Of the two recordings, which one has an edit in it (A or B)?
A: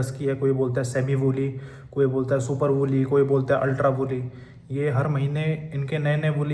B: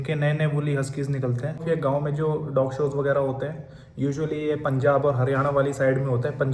B